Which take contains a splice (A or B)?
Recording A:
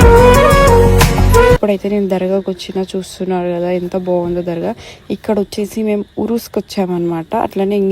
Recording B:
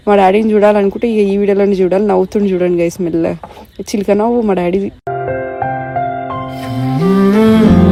A